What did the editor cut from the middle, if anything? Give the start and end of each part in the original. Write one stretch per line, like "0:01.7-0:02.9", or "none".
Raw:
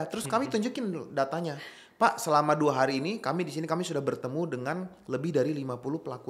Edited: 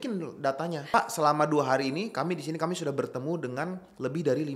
0:01.7-0:02.0